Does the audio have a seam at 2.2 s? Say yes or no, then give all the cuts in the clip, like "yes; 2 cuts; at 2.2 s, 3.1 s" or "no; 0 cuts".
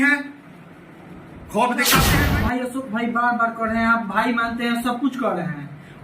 yes; 1 cut; at 2.2 s